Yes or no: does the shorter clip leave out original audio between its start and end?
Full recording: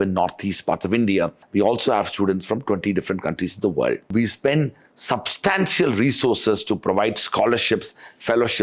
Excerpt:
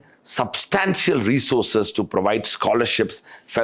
no